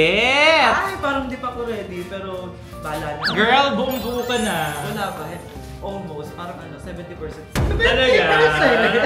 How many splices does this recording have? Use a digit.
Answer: 0